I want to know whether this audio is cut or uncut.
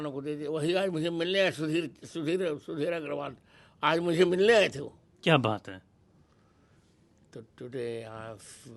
uncut